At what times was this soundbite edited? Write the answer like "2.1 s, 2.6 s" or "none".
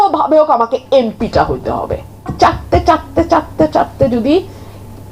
2.3 s